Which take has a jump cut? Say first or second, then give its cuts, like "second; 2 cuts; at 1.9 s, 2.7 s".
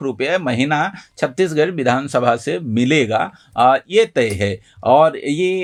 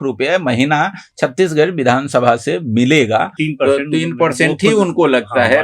second; 1 cut; at 3.4 s